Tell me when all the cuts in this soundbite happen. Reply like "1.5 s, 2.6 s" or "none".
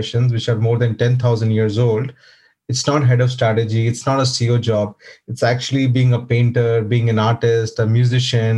none